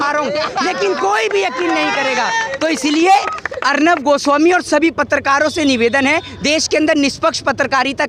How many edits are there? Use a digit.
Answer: 0